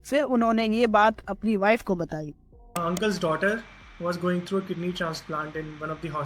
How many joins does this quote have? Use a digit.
1